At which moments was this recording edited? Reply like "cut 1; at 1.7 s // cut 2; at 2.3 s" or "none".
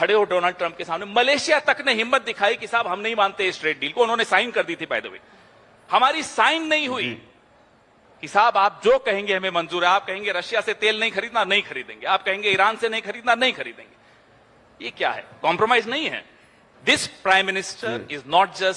none